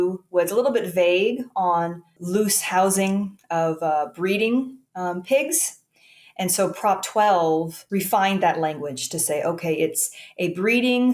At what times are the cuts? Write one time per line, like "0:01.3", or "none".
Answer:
0:02.1
0:07.8